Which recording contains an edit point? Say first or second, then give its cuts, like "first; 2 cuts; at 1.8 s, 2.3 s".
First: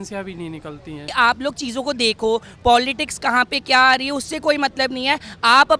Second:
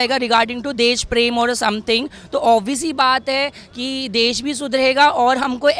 first; 1 cut; at 1.1 s